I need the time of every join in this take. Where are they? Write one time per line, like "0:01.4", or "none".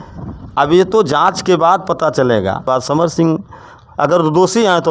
0:02.7